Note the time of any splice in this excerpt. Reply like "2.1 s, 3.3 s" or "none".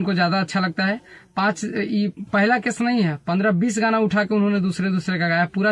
none